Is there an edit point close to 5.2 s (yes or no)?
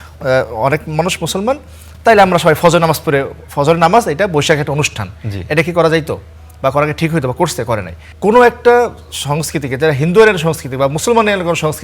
no